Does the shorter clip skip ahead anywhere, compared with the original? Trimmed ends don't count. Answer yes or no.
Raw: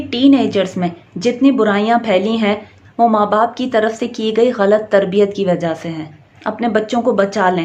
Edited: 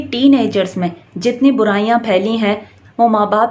no